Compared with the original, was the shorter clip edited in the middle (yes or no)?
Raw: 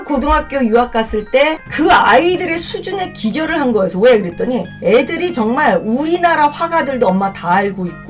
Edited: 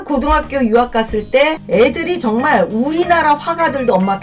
yes